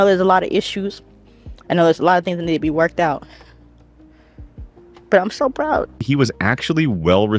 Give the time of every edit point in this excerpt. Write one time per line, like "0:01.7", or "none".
0:06.0